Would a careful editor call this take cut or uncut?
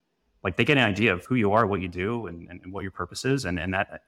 cut